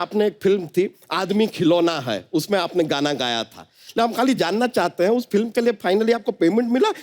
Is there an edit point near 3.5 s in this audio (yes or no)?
no